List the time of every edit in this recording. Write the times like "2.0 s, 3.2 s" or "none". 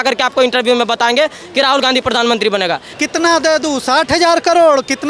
2.9 s

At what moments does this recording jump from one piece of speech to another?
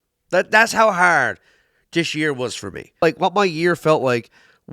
3.0 s

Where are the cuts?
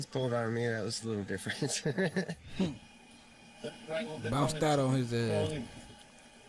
none

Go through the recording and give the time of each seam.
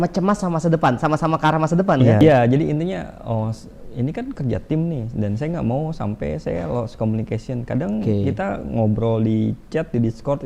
2.2 s

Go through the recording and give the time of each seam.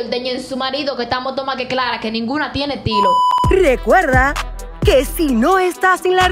3.3 s

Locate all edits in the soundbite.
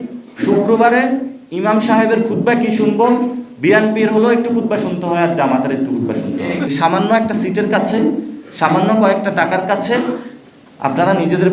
6.7 s

